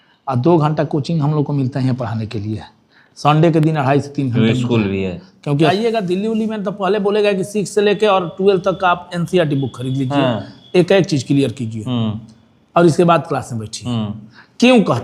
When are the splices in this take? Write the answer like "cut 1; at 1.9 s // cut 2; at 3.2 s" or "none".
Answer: cut 1; at 5.6 s